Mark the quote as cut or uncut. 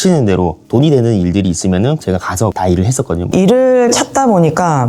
cut